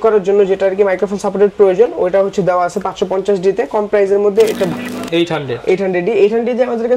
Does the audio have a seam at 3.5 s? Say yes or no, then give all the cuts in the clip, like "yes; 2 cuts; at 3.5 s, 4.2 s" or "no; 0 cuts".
no; 1 cut; at 4.7 s